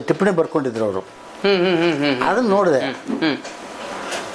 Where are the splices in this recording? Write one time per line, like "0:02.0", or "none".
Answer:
none